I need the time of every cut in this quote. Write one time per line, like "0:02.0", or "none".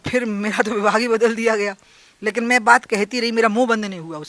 none